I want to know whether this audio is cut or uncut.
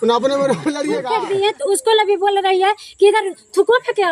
cut